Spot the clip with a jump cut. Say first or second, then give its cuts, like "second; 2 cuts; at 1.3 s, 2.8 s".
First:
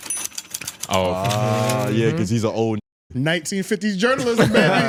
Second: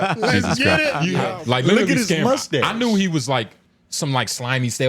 second; 1 cut; at 1.2 s